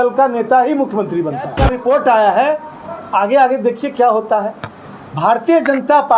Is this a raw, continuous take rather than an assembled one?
no; 1 cut; at 1.6 s

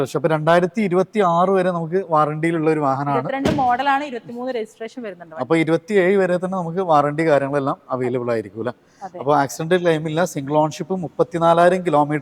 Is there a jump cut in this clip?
no; 0 cuts

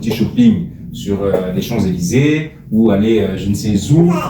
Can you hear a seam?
no; 0 cuts

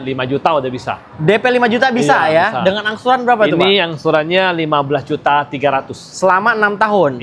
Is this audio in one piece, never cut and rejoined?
yes; 0 cuts

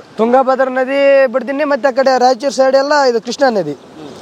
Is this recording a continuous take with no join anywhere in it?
yes; 0 cuts

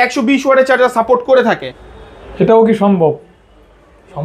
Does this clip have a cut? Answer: yes; 1 cut; at 1.7 s

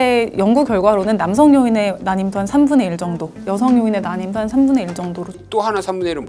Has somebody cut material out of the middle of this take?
yes; 1 cut; at 5.4 s

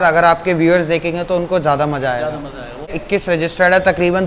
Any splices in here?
yes; 1 cut; at 3.0 s

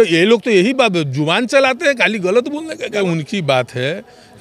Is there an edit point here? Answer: yes; 1 cut; at 3.0 s

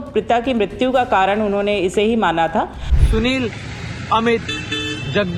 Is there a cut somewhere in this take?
yes; 1 cut; at 2.9 s

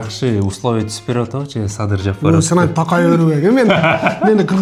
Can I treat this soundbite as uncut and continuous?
yes; 0 cuts

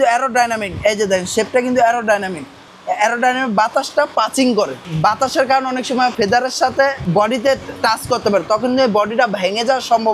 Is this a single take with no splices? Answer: no; 3 cuts; at 4.8 s, 6.1 s, 7.0 s

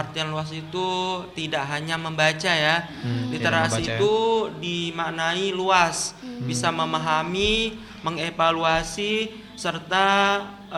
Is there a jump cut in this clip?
no; 0 cuts

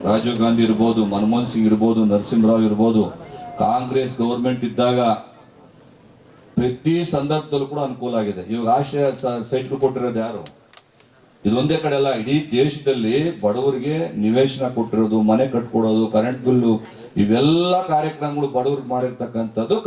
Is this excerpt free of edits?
yes; 0 cuts

